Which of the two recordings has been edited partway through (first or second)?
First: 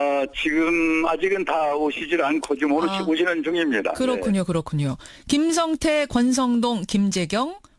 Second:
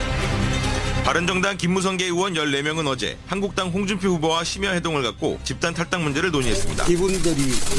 first